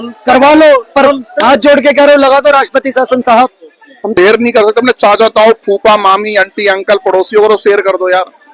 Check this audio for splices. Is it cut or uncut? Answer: cut